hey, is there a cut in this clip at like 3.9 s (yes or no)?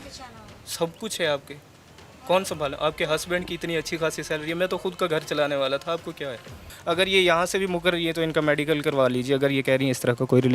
no